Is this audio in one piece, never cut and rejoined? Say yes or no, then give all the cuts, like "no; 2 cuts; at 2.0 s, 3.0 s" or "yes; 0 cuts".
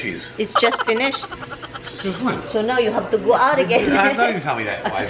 yes; 0 cuts